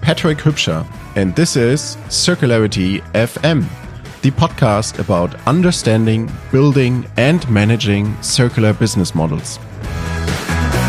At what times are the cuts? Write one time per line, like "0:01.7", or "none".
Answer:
none